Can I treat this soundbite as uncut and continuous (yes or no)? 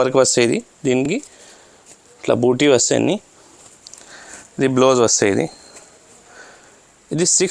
yes